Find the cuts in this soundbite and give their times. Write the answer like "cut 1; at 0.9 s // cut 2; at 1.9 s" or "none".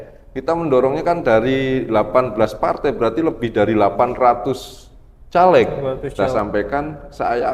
cut 1; at 6.1 s

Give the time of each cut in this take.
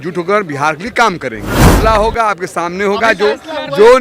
cut 1; at 1.7 s

